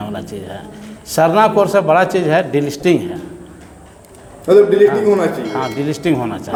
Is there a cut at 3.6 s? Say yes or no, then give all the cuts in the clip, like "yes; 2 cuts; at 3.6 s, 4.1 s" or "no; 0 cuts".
no; 0 cuts